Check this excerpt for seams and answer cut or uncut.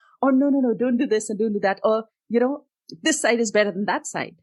uncut